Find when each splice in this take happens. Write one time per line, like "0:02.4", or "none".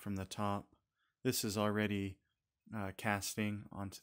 none